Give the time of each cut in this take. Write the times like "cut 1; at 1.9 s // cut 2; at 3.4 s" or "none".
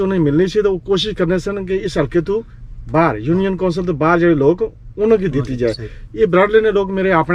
none